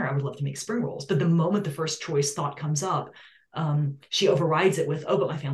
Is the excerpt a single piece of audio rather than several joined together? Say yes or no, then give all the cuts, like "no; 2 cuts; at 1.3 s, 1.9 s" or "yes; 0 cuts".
yes; 0 cuts